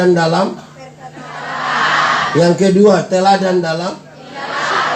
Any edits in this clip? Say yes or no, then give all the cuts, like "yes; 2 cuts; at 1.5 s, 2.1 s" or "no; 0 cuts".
no; 0 cuts